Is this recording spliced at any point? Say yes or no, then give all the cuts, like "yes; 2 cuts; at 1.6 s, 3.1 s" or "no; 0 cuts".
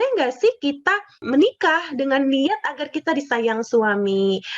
yes; 1 cut; at 1.2 s